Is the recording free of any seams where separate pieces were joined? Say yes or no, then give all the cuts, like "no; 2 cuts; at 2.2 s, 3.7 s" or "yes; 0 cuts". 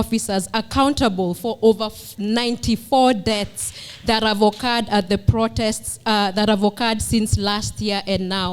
yes; 0 cuts